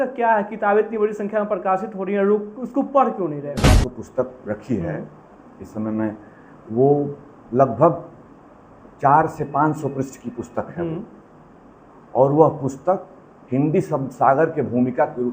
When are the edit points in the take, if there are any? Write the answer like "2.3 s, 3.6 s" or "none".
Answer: 3.8 s